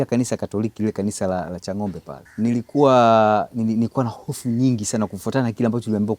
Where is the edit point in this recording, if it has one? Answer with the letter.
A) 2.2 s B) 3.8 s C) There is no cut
A